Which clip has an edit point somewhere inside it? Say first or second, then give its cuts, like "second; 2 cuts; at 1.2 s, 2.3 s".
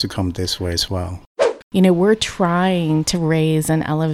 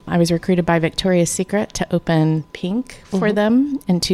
first; 1 cut; at 1.2 s